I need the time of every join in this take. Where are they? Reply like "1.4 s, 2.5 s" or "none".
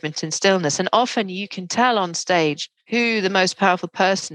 2.7 s